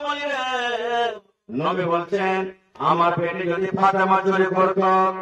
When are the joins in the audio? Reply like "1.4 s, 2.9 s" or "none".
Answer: 1.1 s